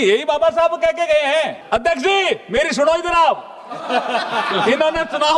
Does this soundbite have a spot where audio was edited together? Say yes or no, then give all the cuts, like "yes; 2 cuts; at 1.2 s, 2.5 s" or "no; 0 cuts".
yes; 1 cut; at 1.6 s